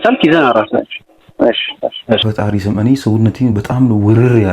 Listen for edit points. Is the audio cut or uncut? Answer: cut